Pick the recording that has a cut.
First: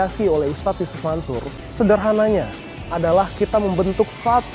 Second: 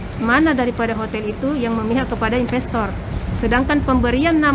first; 1 cut; at 1.6 s

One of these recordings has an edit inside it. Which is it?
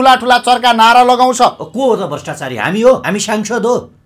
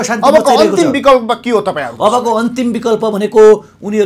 first; 1 cut; at 3.0 s

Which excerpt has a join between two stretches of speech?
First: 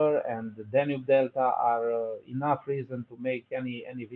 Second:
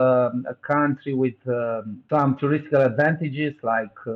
second; 1 cut; at 1.9 s

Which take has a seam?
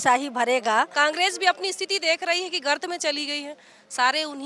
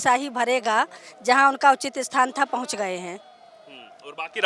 first; 1 cut; at 0.9 s

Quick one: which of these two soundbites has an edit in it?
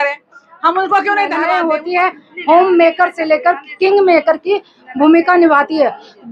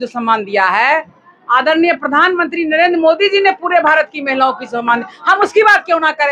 first; 1 cut; at 1.4 s

